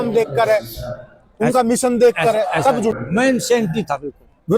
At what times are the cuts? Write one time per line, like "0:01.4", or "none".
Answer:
0:02.9